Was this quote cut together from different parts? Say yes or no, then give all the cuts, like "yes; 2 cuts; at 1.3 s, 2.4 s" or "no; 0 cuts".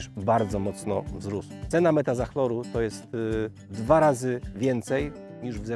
yes; 1 cut; at 1.5 s